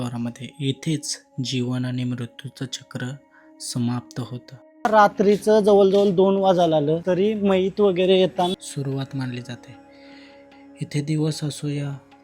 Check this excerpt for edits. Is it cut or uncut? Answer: cut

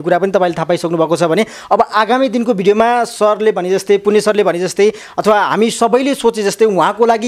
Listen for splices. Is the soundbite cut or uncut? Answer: uncut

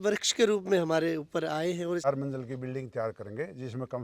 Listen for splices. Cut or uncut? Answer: cut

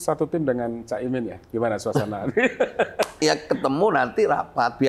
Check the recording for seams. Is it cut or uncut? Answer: cut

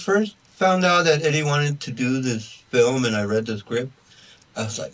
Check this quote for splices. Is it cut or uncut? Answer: uncut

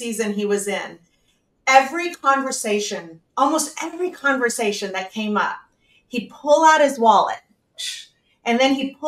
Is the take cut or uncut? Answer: uncut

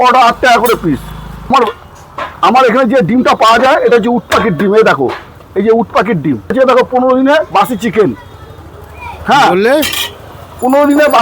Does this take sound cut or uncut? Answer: cut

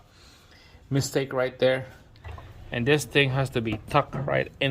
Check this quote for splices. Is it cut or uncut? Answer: cut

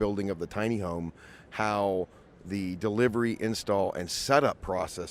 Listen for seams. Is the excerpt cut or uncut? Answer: uncut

